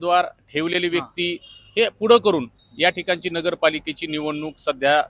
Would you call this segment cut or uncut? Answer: uncut